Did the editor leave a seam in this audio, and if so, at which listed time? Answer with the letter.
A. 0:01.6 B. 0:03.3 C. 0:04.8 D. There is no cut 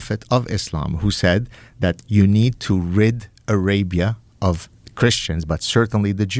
A